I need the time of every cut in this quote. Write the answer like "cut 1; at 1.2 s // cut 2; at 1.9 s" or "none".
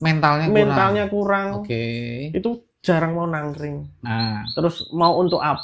cut 1; at 3.9 s